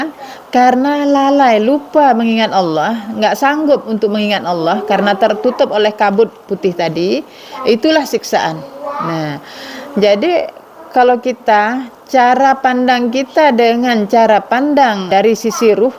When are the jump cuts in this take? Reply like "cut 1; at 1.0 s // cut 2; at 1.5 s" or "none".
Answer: cut 1; at 15.1 s